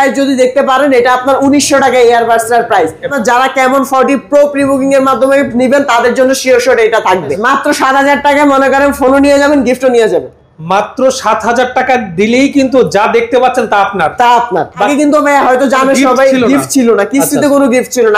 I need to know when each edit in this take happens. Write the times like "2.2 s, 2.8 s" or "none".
3.1 s, 7.3 s, 14.9 s